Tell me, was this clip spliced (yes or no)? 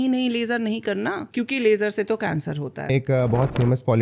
yes